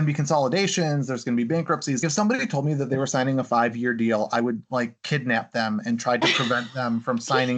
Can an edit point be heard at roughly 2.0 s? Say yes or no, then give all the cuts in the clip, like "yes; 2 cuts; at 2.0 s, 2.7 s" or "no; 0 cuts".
yes; 1 cut; at 2.0 s